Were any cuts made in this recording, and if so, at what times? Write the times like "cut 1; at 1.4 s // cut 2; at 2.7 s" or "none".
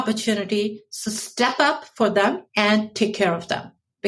cut 1; at 2.4 s